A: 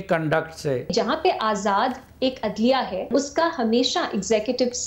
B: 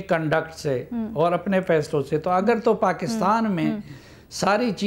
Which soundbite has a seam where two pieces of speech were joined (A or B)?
A